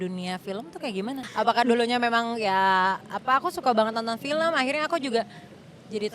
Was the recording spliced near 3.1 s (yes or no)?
no